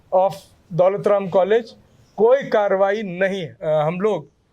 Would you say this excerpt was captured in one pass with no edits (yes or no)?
no